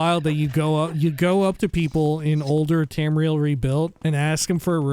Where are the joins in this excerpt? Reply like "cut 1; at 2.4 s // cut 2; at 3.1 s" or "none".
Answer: cut 1; at 4.0 s